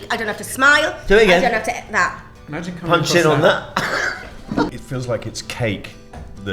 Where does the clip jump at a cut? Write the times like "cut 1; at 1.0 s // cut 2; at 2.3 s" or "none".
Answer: cut 1; at 4.7 s